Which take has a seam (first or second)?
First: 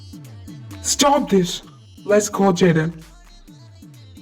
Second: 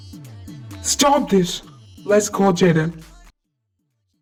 first